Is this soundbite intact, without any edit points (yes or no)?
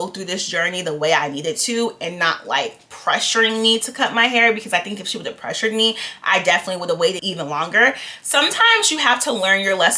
yes